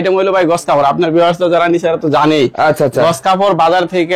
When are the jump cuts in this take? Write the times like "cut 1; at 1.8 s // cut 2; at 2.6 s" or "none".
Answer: none